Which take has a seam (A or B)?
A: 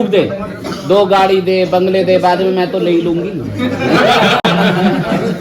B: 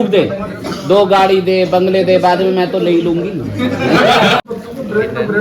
B